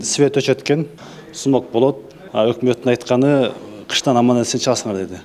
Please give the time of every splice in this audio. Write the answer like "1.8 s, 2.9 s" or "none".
1.0 s, 2.1 s

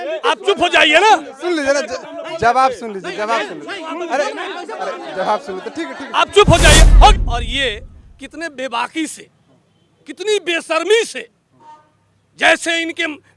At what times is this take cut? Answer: 7.1 s

